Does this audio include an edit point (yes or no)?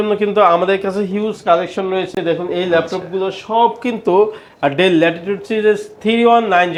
no